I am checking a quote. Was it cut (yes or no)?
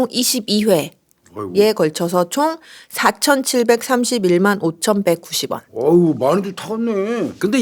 no